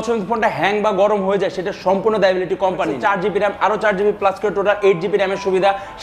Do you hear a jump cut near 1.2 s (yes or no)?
no